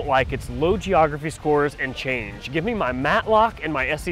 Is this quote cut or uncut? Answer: uncut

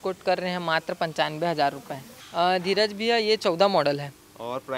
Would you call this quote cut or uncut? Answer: cut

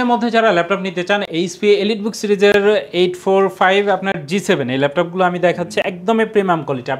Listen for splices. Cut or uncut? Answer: uncut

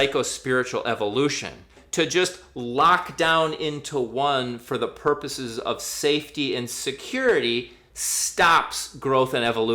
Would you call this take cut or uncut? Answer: cut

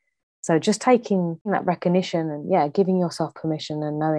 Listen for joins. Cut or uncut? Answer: cut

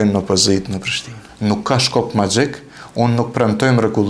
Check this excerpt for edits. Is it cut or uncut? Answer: cut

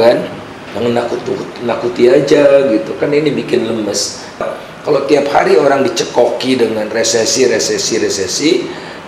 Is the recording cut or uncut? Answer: cut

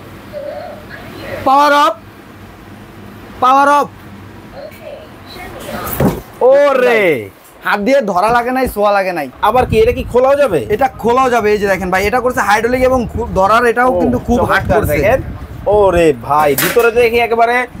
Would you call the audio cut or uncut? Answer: cut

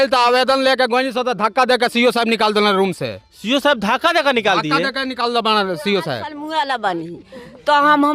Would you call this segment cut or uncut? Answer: cut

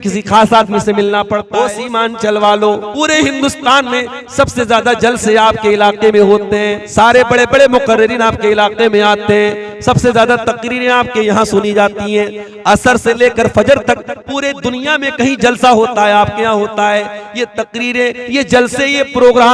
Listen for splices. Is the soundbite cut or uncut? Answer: cut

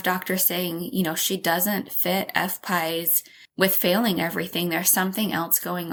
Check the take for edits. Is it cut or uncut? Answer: uncut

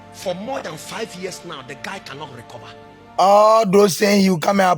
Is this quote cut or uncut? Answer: cut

